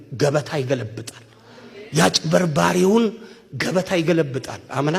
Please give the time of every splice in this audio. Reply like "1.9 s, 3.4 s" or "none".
none